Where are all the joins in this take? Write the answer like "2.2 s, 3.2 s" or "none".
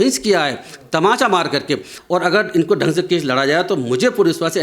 1.9 s